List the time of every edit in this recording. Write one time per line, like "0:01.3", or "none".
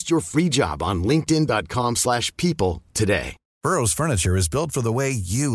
0:03.5